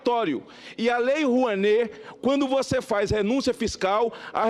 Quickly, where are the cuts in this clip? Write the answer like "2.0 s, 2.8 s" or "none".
none